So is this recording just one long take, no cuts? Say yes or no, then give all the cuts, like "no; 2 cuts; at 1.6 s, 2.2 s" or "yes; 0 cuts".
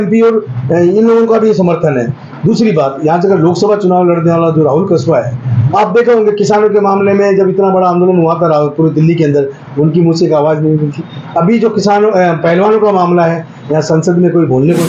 yes; 0 cuts